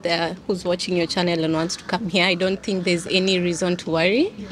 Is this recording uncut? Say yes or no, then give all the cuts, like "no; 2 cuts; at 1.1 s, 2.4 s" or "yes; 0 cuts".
yes; 0 cuts